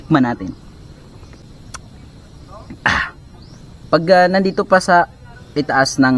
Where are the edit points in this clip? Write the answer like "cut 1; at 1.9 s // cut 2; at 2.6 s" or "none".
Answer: cut 1; at 1.4 s